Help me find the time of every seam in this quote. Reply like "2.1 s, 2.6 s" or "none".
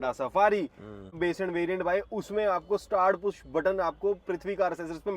1.2 s